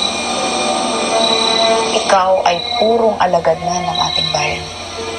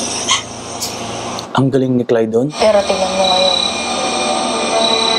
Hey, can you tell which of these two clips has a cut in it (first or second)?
second